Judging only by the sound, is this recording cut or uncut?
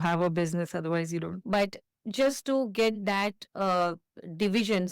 cut